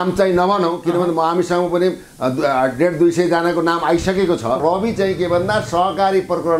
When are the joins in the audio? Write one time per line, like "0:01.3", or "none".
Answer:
0:04.6